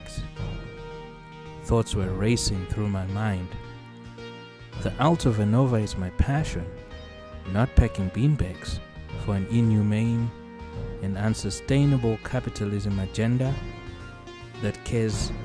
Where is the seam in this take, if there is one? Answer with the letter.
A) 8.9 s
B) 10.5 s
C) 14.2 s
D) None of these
D